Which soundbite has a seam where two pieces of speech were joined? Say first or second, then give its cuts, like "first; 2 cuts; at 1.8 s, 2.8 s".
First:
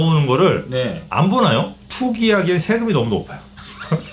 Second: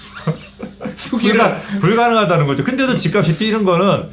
first; 1 cut; at 1.8 s